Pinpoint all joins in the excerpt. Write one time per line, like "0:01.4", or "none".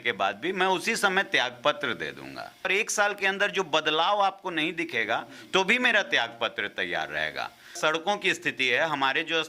0:02.7
0:07.8